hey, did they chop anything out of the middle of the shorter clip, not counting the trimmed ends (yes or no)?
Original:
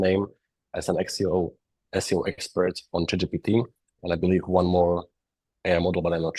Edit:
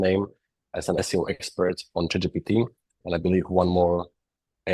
yes